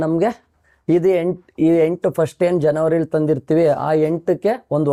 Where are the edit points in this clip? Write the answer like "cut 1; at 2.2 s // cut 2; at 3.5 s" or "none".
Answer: none